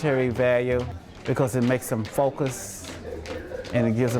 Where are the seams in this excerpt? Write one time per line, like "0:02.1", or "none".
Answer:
0:01.0

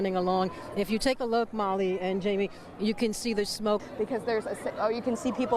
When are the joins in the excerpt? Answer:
0:03.8

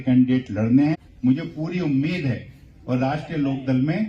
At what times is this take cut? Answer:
0:00.9

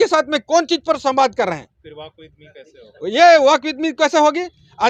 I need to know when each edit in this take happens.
none

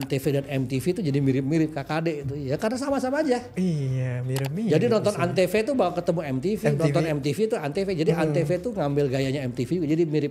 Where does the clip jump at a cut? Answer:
none

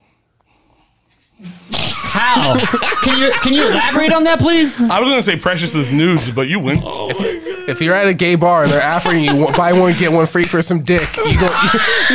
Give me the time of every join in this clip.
none

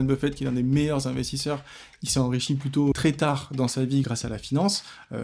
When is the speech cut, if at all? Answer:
0:02.9
0:04.0

